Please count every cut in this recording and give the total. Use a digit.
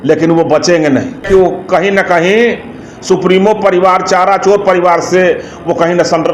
1